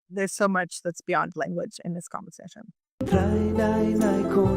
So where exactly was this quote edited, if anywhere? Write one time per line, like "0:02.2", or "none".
0:02.9